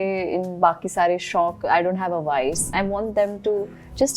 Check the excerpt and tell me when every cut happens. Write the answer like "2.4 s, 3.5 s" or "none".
2.7 s